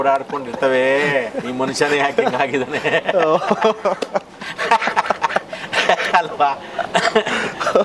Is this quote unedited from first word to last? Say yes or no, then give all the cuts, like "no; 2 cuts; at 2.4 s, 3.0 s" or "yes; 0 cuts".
yes; 0 cuts